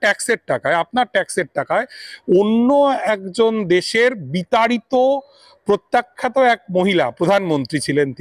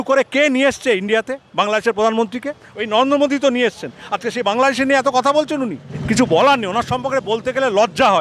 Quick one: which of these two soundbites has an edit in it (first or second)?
second